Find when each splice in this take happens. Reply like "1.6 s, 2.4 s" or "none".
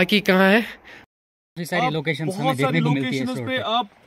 0.9 s